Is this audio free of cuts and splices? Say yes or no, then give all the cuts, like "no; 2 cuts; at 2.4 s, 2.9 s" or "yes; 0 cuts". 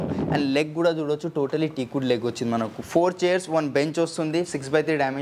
yes; 0 cuts